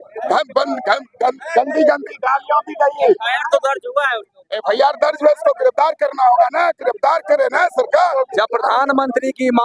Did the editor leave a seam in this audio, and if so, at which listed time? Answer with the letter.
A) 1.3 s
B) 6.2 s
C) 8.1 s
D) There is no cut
C